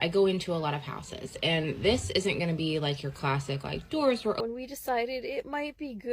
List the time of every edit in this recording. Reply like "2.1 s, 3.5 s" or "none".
4.4 s